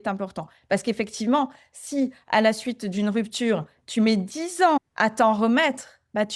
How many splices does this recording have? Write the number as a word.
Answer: zero